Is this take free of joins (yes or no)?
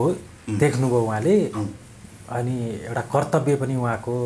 yes